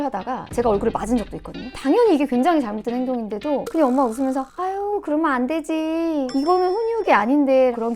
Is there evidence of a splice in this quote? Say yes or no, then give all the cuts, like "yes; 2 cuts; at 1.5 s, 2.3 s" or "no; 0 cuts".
yes; 1 cut; at 1.8 s